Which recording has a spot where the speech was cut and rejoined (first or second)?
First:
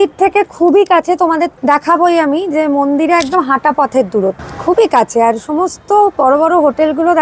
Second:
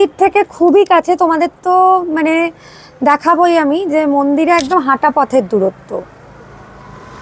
first